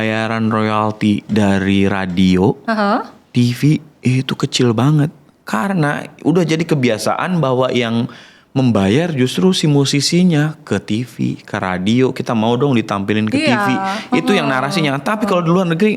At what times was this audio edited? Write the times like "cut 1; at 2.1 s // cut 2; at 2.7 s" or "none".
none